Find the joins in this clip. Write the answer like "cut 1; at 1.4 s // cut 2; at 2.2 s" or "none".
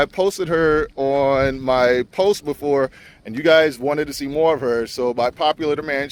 none